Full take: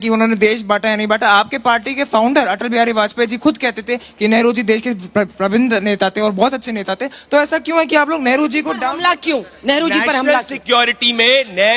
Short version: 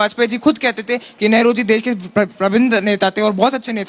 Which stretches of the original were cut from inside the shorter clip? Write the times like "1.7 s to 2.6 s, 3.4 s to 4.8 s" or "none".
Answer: none